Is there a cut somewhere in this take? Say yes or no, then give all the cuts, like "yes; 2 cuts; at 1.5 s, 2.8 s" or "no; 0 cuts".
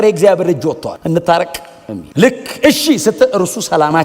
yes; 1 cut; at 0.9 s